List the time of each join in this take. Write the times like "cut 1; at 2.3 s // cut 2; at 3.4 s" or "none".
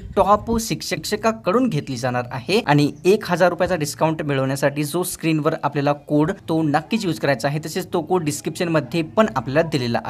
cut 1; at 0.9 s // cut 2; at 2.6 s // cut 3; at 6.4 s